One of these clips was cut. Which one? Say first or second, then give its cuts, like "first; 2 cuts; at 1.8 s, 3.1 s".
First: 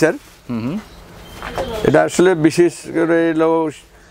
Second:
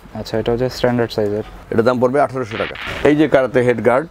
second; 2 cuts; at 1.5 s, 2.8 s